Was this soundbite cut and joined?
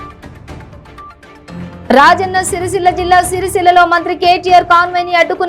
no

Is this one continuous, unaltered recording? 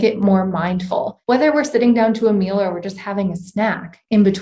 no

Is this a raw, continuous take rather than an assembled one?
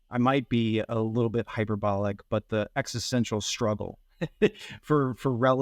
yes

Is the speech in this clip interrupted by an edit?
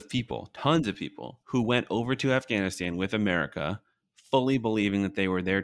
no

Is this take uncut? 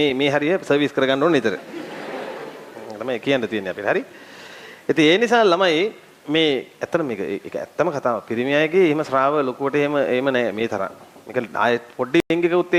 yes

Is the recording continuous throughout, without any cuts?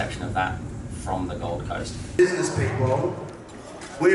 no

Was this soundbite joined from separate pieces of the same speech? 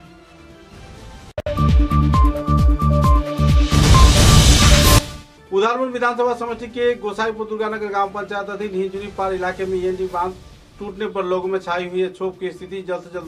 yes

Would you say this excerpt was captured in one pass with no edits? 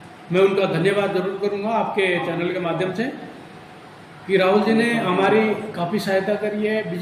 yes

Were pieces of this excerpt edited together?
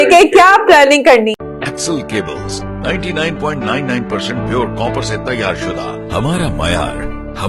yes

